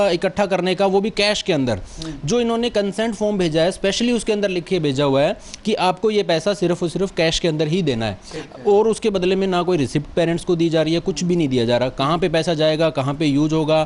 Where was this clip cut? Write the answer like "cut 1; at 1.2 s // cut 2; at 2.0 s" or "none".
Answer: none

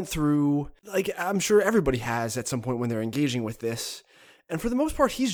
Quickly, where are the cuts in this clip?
none

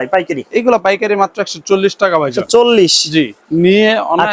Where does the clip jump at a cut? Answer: none

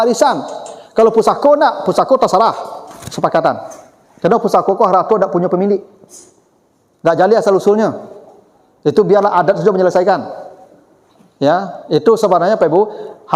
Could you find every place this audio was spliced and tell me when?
none

